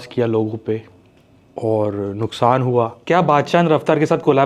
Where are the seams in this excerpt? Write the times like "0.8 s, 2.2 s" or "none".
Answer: 3.0 s